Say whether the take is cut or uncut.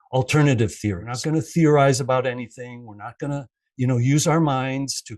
cut